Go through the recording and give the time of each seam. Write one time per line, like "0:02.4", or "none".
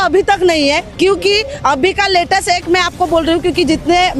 none